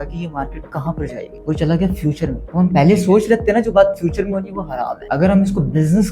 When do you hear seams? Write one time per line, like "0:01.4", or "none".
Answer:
0:01.3
0:02.4
0:05.0